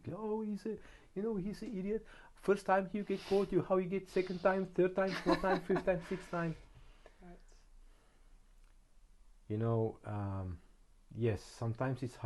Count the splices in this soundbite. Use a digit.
0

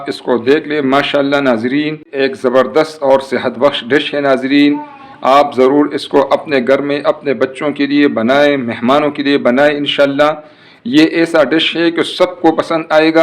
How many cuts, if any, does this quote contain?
1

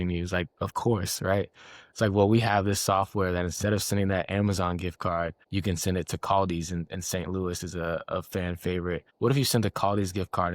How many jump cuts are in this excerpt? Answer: 2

